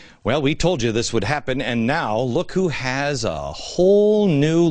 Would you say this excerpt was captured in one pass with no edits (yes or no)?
no